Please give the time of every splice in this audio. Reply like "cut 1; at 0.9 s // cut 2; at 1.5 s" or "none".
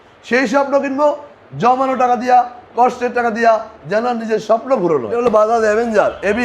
cut 1; at 5.4 s